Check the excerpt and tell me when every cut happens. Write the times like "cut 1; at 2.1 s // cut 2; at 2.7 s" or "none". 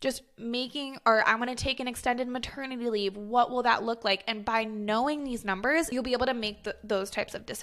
cut 1; at 5.9 s